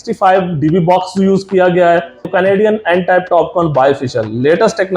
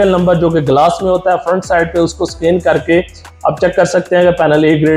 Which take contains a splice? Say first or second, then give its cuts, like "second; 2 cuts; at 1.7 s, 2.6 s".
first; 1 cut; at 2.3 s